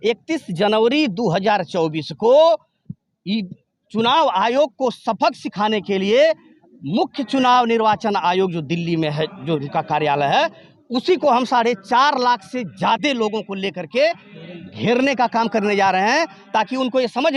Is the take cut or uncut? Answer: uncut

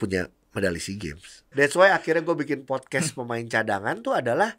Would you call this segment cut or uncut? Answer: cut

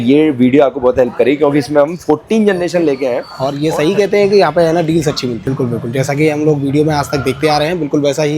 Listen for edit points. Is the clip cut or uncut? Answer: cut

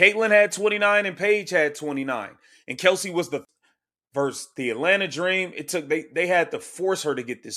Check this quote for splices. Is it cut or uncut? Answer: cut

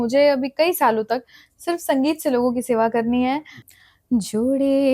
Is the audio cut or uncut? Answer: cut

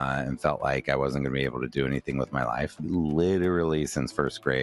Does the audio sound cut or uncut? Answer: uncut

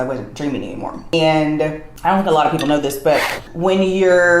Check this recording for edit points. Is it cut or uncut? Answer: cut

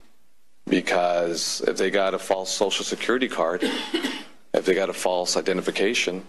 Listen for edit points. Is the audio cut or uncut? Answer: uncut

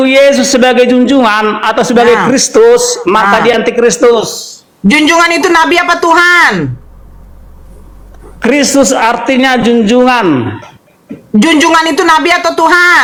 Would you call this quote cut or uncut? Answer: uncut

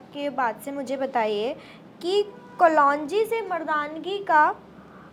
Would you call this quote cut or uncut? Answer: uncut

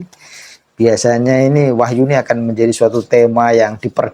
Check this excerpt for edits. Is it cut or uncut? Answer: uncut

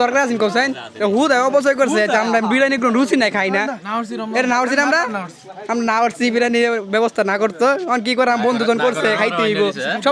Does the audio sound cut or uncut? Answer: uncut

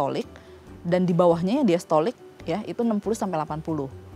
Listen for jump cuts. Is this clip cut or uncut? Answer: uncut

